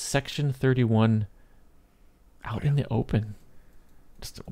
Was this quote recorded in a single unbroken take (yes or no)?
yes